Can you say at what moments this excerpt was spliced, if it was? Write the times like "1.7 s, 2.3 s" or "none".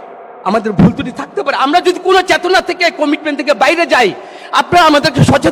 none